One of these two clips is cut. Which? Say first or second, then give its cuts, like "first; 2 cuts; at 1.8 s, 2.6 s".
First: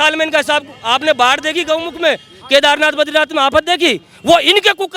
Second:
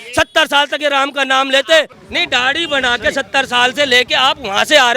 second; 1 cut; at 2.0 s